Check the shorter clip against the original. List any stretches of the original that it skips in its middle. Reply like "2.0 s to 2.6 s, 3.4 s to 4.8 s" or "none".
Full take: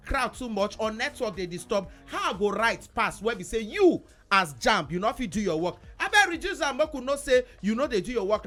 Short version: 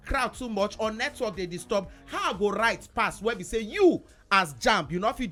none